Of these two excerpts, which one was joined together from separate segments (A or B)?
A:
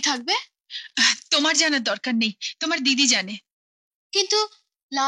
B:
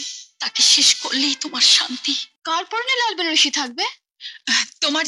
B